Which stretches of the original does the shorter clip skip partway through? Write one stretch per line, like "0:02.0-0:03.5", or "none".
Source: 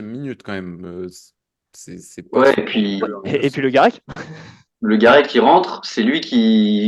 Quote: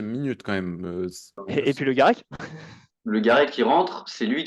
0:01.4-0:03.2